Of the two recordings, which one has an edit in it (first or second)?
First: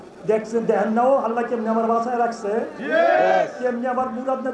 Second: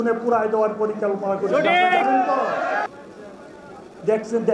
second